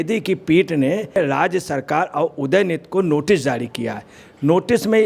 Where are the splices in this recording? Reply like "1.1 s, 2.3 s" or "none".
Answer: 1.2 s

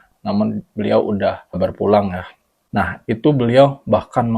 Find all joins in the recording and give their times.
none

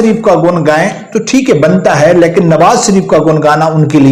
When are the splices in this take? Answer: none

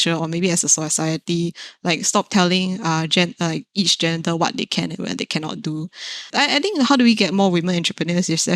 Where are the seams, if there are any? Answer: 6.2 s

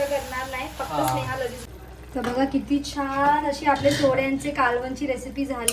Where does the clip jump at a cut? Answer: 1.6 s

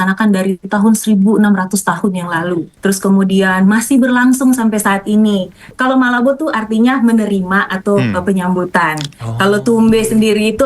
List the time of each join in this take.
2.7 s, 5.7 s

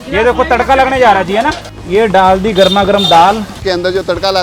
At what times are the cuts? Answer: 1.7 s, 3.6 s

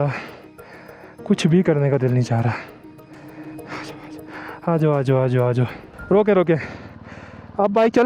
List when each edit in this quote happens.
none

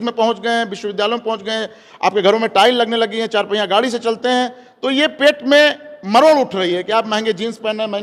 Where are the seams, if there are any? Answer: none

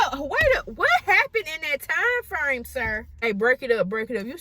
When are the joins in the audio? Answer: 3.2 s

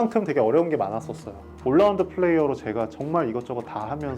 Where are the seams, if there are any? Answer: 1.5 s

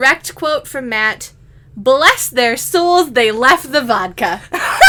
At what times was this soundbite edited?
none

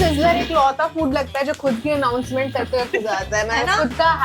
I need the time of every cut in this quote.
none

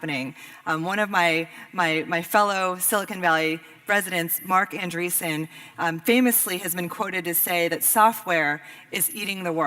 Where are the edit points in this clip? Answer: 1.4 s

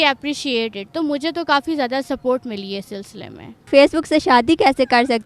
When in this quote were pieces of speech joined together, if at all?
3.7 s

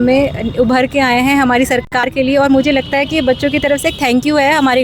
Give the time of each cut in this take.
none

